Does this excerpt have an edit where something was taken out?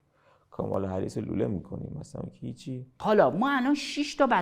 yes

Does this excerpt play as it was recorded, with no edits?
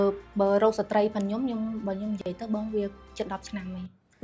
yes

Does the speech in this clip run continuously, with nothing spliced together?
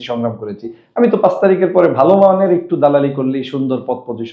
yes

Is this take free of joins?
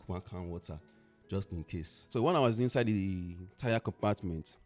no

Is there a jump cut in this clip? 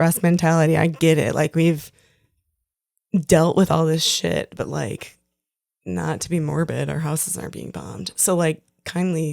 no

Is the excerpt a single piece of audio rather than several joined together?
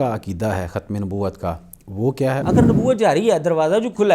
no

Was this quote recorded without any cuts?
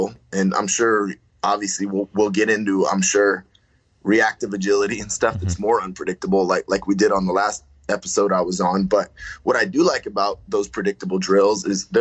yes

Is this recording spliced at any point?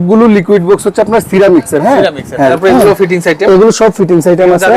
yes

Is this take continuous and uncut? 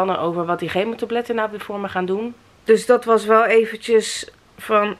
no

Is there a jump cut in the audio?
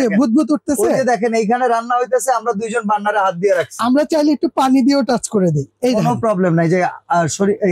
no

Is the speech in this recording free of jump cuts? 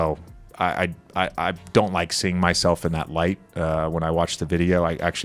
yes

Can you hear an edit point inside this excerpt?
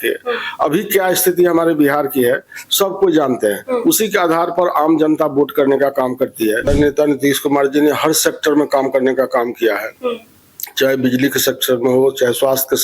yes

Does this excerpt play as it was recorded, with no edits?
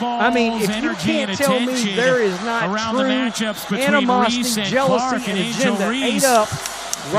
yes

